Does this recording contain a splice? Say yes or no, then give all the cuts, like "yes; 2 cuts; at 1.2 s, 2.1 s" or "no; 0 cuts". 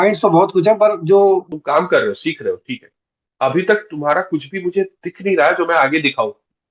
yes; 1 cut; at 1.5 s